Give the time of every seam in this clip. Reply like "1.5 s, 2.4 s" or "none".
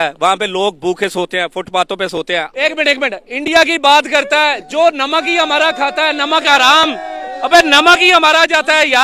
2.5 s